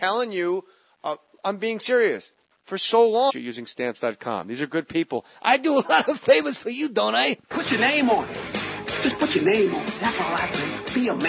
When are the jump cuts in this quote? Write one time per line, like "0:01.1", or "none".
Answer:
none